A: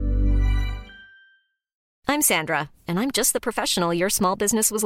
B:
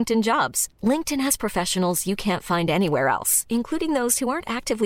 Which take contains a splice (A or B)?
A